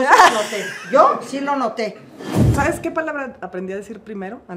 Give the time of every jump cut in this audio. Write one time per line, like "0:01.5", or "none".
0:02.5

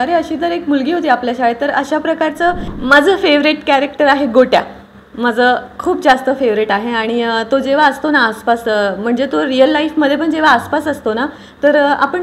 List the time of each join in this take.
0:02.8

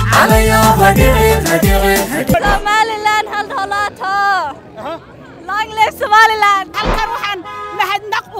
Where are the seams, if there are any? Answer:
0:06.8

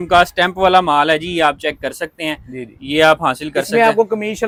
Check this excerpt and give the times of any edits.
none

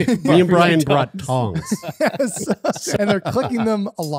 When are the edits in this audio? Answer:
0:03.0

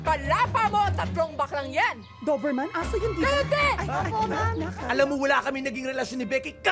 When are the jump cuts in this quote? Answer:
0:04.8

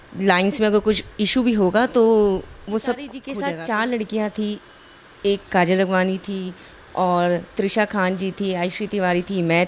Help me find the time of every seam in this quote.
0:03.2

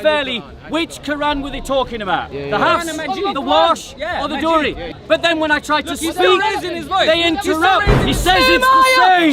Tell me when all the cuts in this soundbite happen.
0:04.9
0:08.0

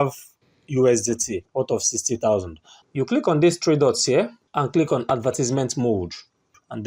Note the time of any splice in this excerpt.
0:01.4
0:02.8

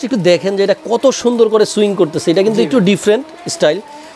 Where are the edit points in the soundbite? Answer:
none

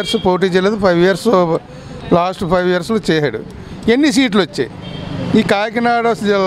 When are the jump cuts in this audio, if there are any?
none

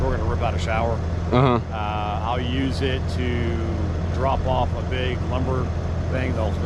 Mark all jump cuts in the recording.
none

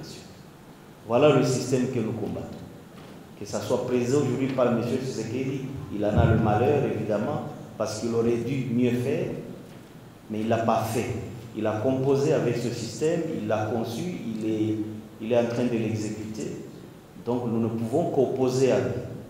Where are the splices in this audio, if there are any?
none

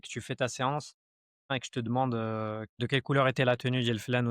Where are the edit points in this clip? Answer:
0:01.5
0:02.7

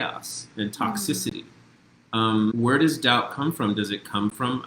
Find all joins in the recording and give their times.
0:02.5

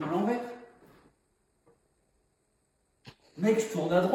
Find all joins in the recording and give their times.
0:01.8

